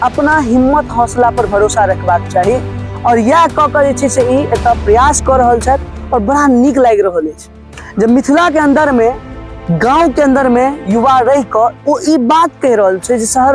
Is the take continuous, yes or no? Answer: yes